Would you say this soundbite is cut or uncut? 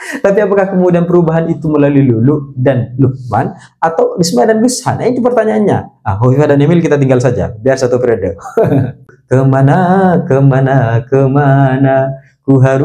cut